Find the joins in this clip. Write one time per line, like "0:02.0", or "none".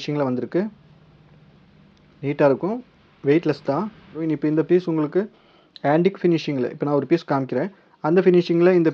0:04.1